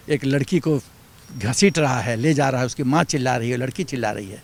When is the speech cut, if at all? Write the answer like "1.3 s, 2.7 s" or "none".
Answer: none